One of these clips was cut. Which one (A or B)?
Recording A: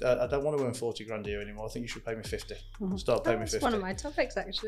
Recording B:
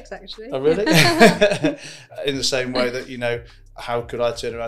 B